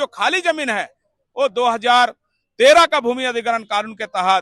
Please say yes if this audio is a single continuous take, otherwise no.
yes